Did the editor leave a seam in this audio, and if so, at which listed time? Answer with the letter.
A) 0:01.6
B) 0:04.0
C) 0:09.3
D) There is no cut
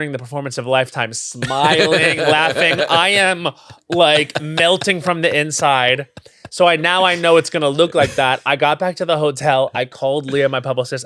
D